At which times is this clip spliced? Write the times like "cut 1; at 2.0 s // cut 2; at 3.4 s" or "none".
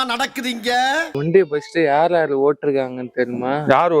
cut 1; at 1.1 s